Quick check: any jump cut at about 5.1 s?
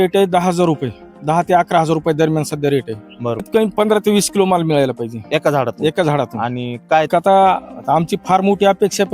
no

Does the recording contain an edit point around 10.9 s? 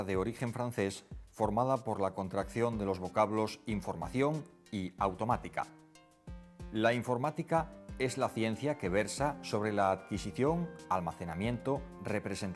no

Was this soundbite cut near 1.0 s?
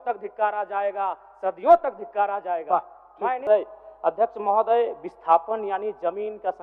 no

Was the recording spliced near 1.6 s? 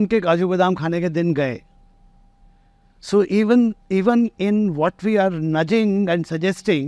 no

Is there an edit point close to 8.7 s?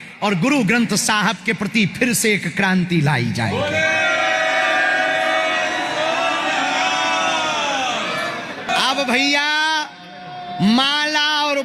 yes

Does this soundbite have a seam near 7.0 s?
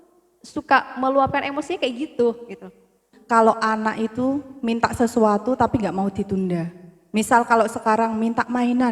no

